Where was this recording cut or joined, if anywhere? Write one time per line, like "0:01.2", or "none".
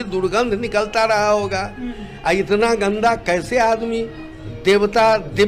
none